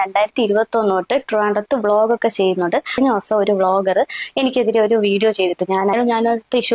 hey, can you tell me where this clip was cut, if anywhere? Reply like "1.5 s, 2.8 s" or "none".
none